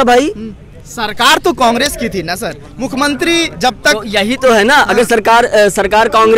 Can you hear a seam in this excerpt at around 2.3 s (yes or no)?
no